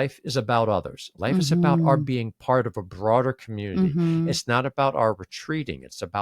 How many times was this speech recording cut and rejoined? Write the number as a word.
one